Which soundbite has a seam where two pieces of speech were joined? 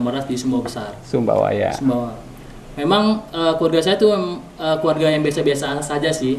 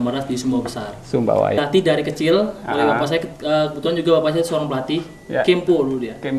second; 1 cut; at 1.6 s

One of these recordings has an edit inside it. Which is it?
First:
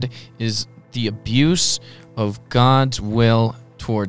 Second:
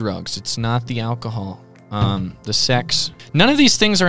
second; 1 cut; at 3.2 s

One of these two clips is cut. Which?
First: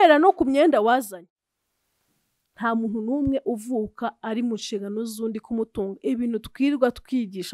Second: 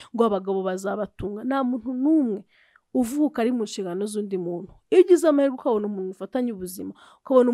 first; 1 cut; at 1.2 s

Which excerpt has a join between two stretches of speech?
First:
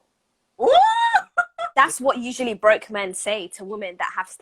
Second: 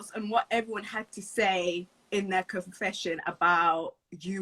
first; 1 cut; at 1.6 s

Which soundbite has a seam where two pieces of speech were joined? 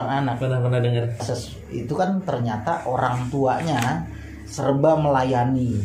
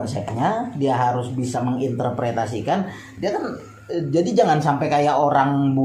first; 1 cut; at 1.3 s

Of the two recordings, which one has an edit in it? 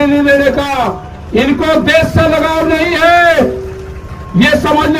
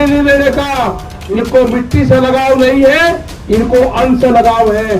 second; 1 cut; at 1.4 s

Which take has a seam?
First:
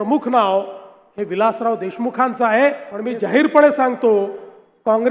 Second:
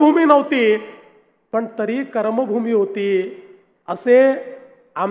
first; 1 cut; at 2.9 s

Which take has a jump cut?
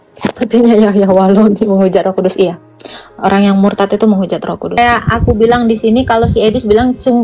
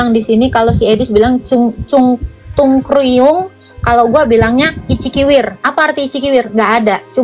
first; 1 cut; at 4.6 s

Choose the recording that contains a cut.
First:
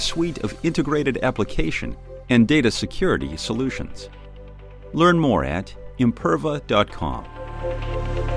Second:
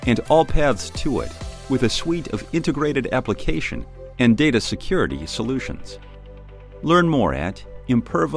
first; 1 cut; at 7.4 s

